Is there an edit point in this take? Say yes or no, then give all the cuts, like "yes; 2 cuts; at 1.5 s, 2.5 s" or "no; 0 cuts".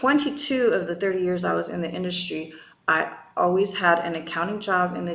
no; 0 cuts